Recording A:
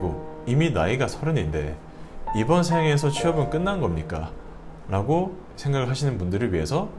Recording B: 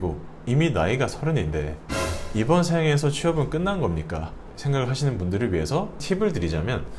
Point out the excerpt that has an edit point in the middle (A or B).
B